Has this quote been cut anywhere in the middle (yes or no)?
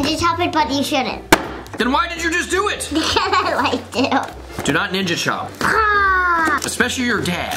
yes